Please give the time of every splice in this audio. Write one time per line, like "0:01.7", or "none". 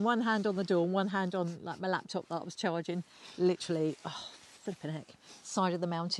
none